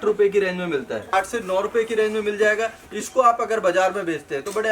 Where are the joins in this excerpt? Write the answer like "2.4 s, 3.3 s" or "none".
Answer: 1.1 s